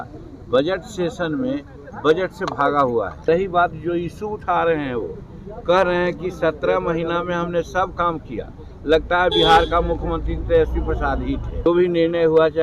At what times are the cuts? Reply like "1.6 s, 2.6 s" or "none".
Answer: 3.2 s, 11.7 s